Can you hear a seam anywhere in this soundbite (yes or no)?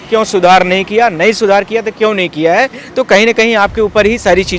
no